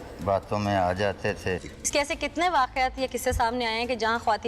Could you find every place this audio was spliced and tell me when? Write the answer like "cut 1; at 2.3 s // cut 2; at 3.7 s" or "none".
cut 1; at 1.6 s

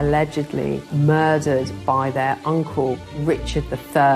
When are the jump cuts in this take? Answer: cut 1; at 3.1 s

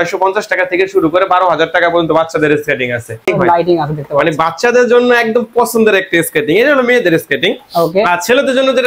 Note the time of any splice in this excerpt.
cut 1; at 3.2 s

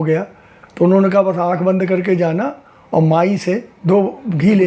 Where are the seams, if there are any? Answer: cut 1; at 3.7 s

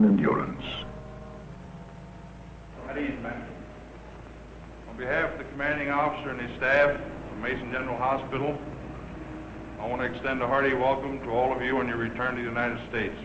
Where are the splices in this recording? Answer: none

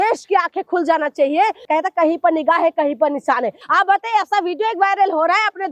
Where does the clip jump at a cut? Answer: cut 1; at 1.6 s // cut 2; at 3.6 s

